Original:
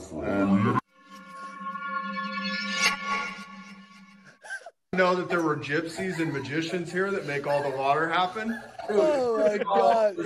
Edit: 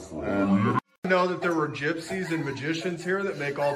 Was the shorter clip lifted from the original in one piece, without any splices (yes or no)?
no